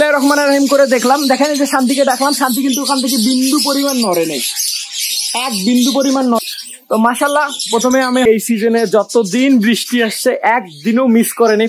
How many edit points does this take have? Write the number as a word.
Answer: two